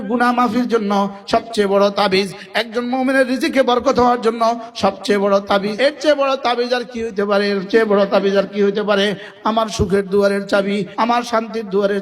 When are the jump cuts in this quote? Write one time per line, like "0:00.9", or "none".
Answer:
0:05.7
0:09.3
0:10.9